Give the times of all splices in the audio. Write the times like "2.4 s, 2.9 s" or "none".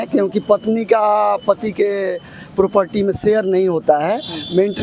none